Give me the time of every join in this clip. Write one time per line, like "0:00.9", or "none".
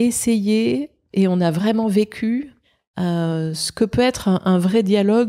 none